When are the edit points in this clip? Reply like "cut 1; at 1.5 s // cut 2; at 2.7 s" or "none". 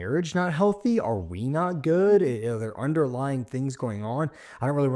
none